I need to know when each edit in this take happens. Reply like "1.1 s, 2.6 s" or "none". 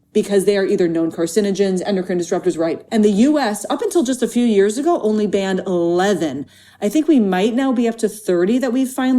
2.8 s